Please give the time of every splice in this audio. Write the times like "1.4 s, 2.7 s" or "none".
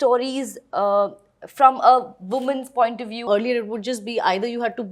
3.2 s